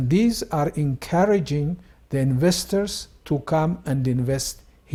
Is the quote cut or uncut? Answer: uncut